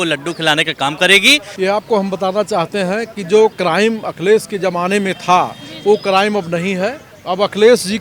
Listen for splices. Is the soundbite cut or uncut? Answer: cut